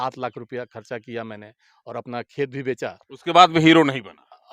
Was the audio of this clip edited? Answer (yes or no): no